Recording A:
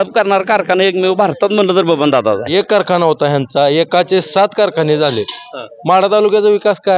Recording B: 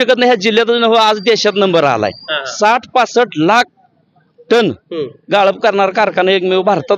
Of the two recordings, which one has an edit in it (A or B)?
A